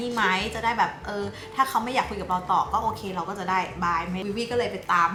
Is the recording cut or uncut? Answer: uncut